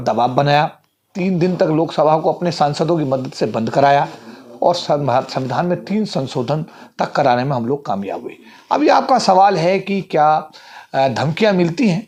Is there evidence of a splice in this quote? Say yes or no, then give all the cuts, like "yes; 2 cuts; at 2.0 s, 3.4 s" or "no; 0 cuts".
no; 0 cuts